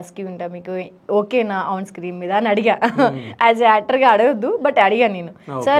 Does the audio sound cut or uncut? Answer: uncut